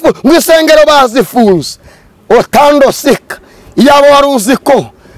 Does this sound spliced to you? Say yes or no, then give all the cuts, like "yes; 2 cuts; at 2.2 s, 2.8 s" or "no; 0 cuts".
no; 0 cuts